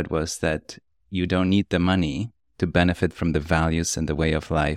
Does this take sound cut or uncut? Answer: uncut